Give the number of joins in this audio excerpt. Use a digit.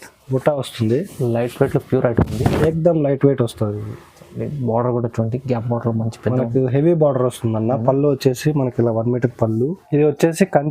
1